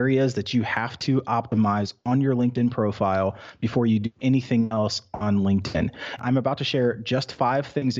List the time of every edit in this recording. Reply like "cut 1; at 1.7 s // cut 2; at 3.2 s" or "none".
cut 1; at 6.2 s